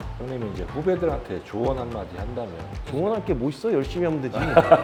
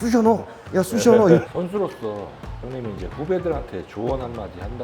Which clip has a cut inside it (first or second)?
second